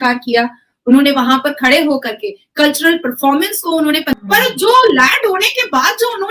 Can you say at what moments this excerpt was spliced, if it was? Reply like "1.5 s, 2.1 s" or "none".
4.1 s